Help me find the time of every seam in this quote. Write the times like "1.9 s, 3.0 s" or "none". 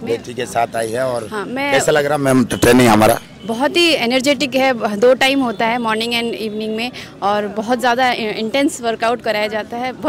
none